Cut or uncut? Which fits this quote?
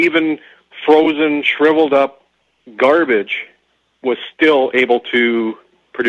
uncut